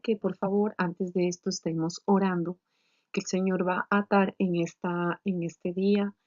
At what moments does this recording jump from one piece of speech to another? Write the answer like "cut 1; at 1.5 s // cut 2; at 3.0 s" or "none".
cut 1; at 1.7 s